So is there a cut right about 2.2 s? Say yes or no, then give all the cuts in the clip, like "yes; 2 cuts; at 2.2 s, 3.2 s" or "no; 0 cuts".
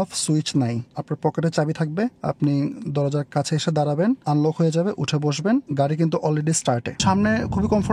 yes; 5 cuts; at 0.9 s, 2.2 s, 4.2 s, 5.7 s, 7.0 s